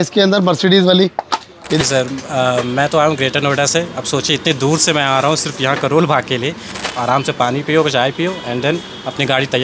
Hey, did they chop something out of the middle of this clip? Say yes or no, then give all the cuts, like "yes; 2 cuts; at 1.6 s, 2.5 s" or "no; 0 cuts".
yes; 2 cuts; at 1.8 s, 6.8 s